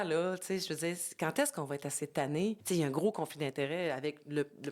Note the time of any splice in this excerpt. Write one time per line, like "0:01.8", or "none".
0:02.6

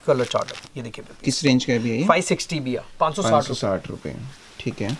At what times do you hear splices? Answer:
none

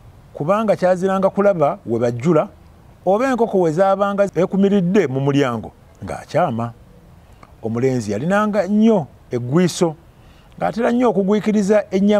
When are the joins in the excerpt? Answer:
0:04.3

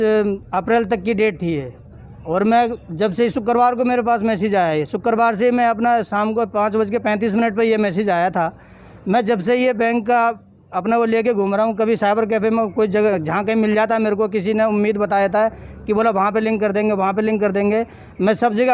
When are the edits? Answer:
none

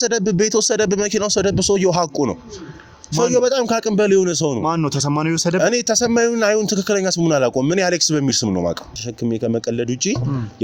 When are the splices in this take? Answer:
0:09.0

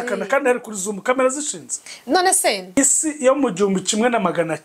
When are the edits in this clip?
0:02.7

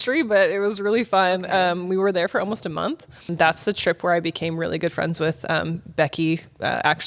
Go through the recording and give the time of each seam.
0:03.3

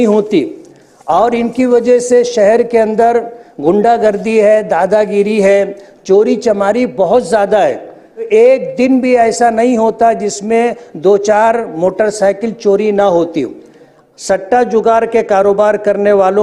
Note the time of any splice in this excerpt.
0:08.3
0:14.1

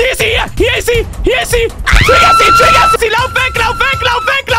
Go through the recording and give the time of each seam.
none

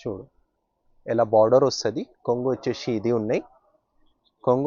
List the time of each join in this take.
none

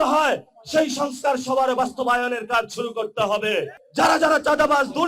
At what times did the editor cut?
0:03.8

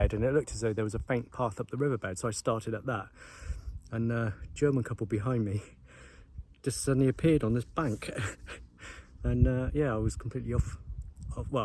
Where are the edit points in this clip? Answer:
none

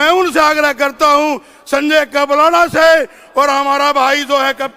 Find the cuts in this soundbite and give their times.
none

